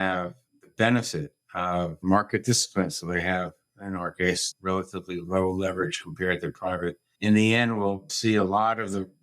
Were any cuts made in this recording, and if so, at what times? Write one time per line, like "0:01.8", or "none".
0:08.1

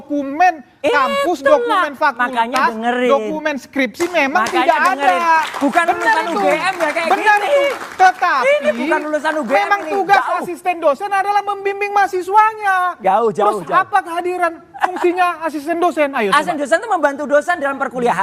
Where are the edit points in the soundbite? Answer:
none

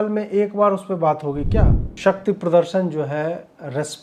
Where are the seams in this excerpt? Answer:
0:01.8

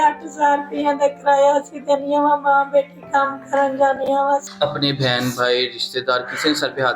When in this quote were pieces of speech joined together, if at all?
0:04.5

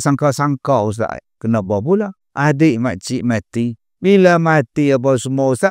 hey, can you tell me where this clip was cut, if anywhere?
0:01.3
0:02.2
0:03.8

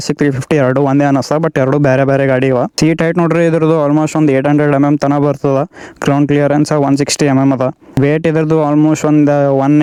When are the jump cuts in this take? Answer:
none

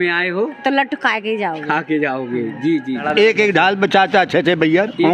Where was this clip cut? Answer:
0:03.0

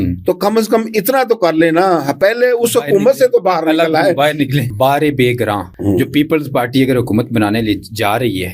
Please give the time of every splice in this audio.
0:04.7
0:05.7

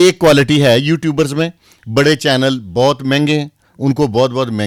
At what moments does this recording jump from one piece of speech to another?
none

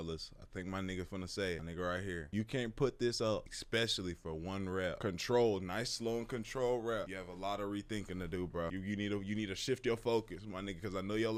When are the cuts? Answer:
none

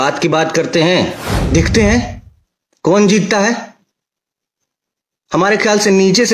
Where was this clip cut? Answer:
0:01.3

